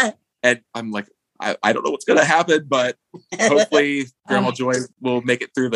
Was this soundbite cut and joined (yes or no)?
yes